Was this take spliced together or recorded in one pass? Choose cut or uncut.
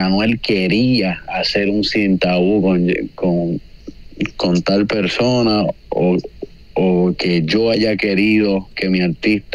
uncut